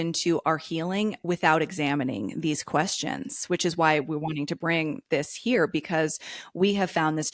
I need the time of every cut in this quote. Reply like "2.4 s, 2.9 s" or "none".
none